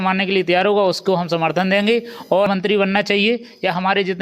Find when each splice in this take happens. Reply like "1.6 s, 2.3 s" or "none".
2.5 s